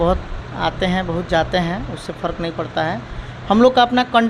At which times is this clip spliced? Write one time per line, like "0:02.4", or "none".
none